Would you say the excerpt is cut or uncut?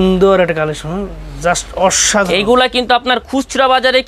uncut